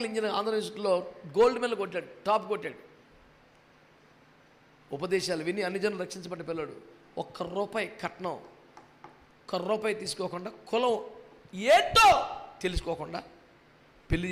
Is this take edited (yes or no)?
no